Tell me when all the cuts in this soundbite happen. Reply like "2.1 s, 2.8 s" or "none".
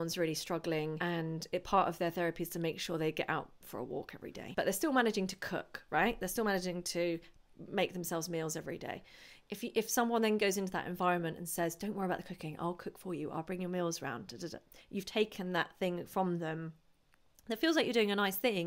1.0 s, 4.4 s